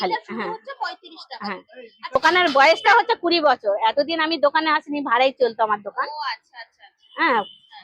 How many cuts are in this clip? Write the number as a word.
one